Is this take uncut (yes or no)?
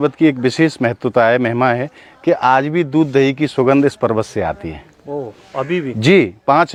yes